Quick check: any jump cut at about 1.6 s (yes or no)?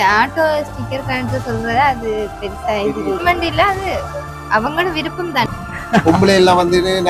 no